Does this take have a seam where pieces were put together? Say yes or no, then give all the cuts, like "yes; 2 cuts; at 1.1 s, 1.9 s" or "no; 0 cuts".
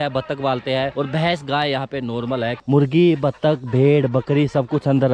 yes; 2 cuts; at 0.9 s, 2.6 s